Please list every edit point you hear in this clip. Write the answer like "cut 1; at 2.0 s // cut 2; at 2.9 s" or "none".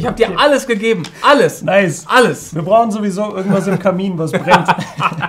none